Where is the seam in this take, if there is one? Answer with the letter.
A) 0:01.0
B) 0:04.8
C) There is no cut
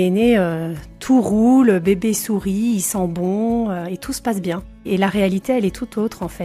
B